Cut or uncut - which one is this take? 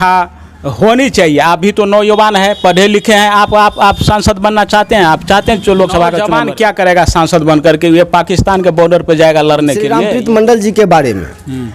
cut